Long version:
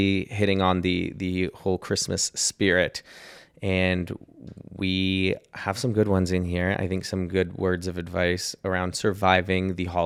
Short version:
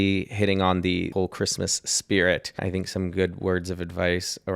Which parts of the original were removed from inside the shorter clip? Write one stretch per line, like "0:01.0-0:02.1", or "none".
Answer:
0:01.1-0:01.6
0:03.1-0:06.8